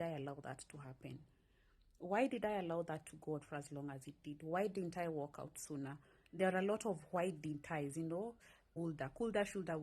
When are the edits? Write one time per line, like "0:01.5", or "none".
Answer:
0:08.7

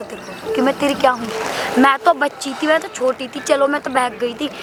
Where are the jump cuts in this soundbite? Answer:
none

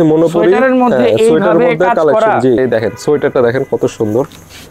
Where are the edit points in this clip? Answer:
0:02.6

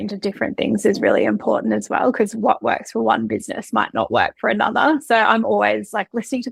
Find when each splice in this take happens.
none

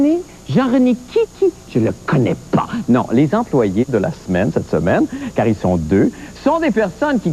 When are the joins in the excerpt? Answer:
0:04.2

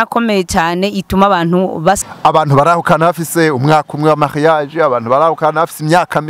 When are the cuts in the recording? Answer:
0:02.0

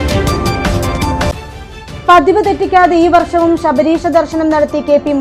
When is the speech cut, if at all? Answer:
0:01.3

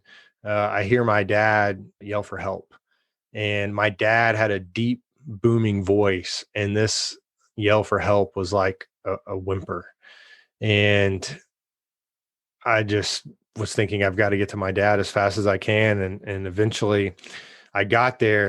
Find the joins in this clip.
0:02.0

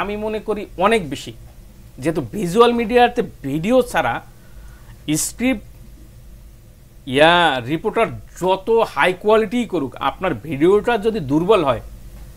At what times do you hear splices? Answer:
none

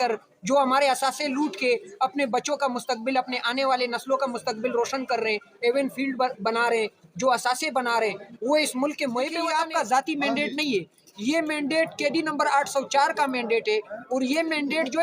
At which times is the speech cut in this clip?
0:09.4

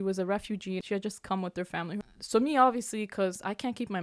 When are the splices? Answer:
0:00.8
0:02.0

